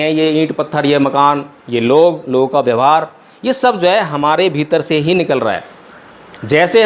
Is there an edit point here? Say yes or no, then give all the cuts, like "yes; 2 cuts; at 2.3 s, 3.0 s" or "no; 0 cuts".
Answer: no; 0 cuts